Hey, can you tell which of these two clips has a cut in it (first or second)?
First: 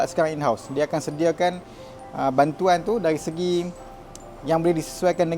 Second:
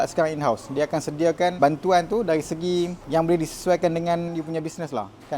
second